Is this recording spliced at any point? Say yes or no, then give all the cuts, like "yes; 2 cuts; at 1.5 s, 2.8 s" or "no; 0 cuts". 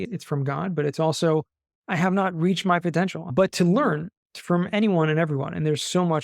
yes; 1 cut; at 3.3 s